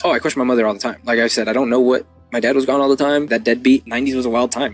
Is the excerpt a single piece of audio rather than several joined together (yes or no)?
no